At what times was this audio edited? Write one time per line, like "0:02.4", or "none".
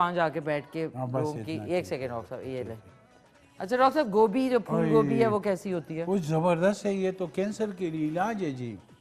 none

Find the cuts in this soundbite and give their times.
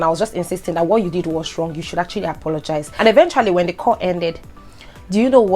0:02.9

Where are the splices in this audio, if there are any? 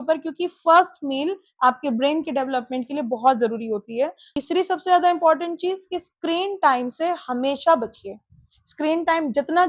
0:04.3

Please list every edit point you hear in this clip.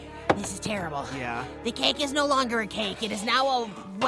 none

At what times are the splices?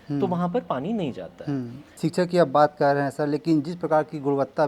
0:01.8

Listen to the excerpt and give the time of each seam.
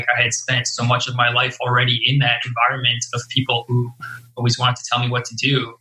none

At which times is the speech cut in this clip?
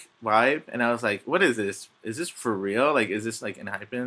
none

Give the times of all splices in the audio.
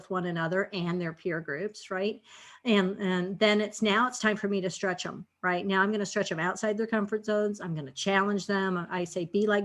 none

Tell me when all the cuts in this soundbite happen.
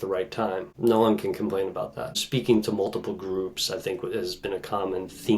0:02.2

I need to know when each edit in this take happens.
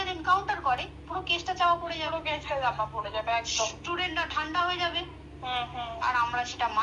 none

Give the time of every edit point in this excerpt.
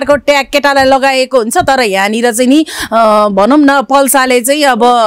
none

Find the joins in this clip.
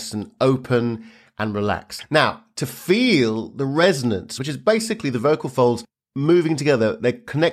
0:01.9
0:04.3

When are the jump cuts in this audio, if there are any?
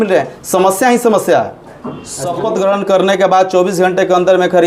0:01.6

